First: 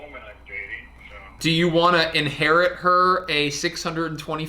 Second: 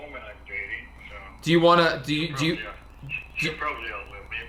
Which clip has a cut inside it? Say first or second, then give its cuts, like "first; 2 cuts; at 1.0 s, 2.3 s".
first; 1 cut; at 1.4 s